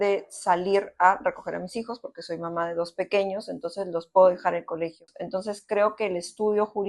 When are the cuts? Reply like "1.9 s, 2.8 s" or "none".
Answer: 5.0 s